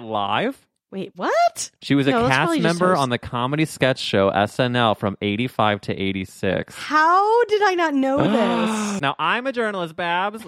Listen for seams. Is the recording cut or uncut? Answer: cut